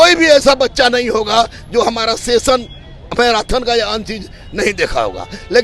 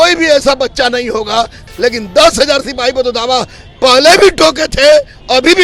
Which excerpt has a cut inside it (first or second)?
second